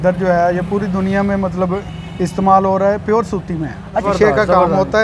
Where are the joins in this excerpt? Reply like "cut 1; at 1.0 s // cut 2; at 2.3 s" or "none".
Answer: cut 1; at 4.0 s

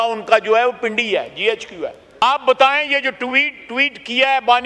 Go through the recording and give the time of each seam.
cut 1; at 2.0 s

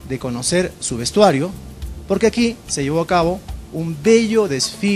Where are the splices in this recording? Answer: cut 1; at 2.2 s

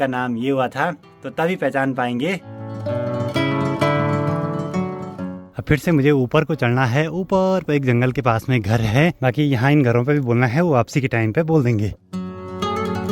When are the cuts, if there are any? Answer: none

